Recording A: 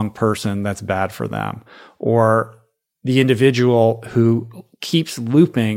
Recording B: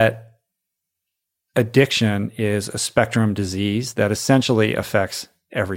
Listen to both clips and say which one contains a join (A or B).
B